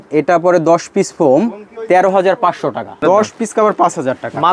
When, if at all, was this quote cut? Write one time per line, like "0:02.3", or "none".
0:03.0